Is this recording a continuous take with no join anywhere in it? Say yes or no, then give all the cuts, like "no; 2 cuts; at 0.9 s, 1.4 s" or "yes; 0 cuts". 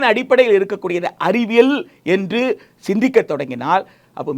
yes; 0 cuts